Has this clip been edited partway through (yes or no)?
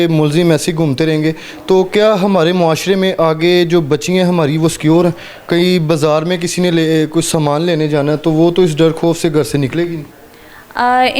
no